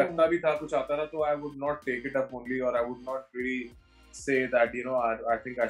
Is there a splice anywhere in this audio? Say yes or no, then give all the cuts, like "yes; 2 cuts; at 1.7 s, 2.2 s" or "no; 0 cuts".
no; 0 cuts